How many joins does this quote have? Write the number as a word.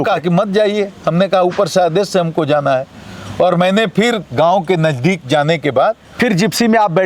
zero